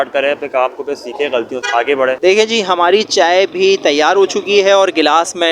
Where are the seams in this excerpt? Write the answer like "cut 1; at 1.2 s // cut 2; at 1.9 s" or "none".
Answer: cut 1; at 2.2 s